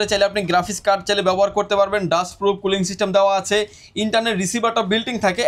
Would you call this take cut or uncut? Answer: uncut